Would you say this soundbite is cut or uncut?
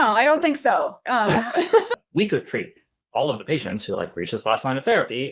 cut